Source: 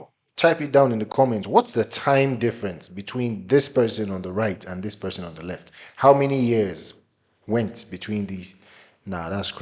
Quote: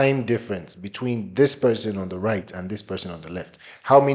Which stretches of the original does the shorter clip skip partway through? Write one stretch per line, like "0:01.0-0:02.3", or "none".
none